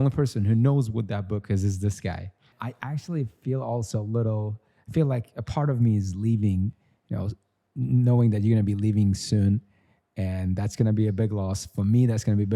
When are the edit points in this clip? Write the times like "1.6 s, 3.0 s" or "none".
2.6 s